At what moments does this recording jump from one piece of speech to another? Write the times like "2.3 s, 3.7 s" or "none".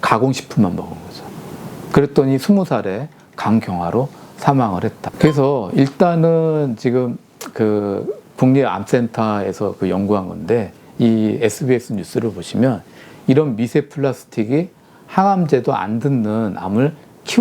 5.0 s